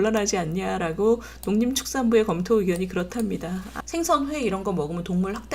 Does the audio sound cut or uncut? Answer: cut